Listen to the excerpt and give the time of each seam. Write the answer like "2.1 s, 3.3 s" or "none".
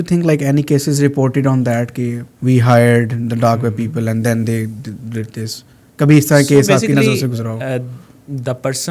2.3 s